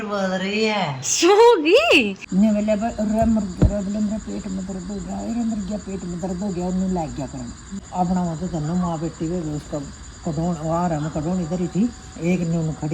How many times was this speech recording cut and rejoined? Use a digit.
2